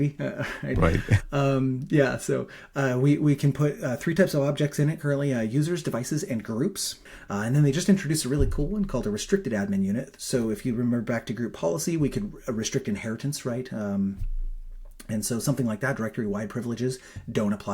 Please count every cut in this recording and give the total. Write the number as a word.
one